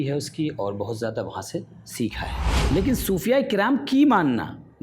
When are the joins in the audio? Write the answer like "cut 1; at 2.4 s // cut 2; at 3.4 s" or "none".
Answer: cut 1; at 2.6 s